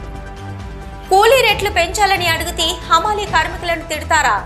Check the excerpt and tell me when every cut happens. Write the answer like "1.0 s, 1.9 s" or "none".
1.0 s